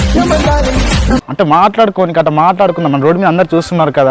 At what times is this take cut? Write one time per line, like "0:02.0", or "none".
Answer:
0:01.2